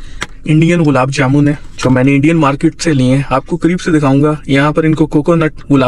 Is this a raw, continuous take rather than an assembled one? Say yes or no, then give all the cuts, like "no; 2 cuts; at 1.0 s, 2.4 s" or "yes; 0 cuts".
yes; 0 cuts